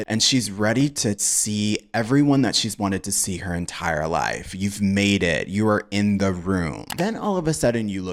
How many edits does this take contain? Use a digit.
1